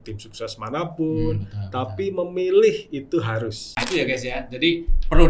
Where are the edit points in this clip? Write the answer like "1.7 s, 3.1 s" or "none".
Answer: 3.8 s